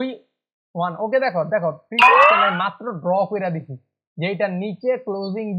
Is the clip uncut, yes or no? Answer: yes